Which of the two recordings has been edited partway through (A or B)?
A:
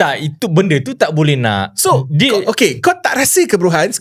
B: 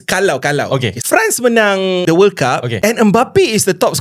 B